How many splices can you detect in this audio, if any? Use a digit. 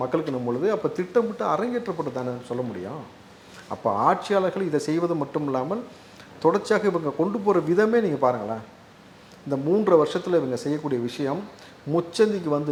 0